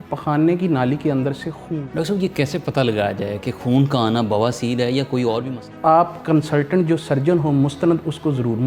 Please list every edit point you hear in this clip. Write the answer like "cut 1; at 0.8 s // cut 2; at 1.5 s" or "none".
cut 1; at 1.6 s // cut 2; at 5.7 s